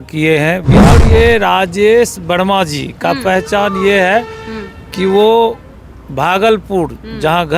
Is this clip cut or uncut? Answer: cut